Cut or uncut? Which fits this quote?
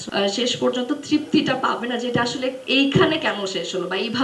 uncut